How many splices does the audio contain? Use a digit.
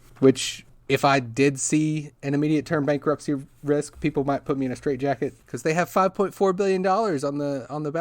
1